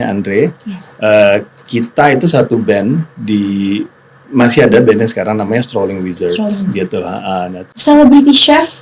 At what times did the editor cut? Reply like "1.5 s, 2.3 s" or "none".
7.7 s

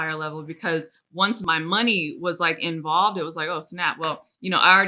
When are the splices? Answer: 1.4 s

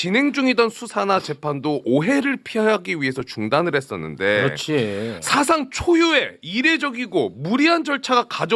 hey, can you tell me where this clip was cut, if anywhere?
none

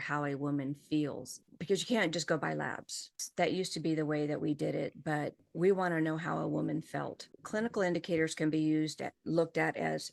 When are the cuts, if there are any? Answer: none

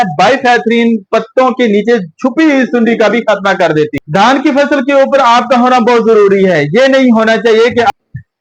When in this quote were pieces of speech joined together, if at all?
1.1 s, 4.0 s

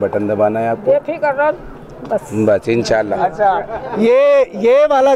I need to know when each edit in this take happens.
none

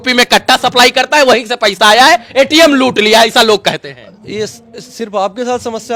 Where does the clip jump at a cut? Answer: none

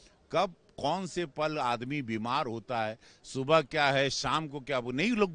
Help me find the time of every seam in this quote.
none

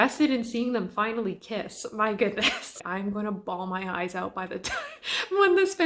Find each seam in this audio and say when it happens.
2.8 s

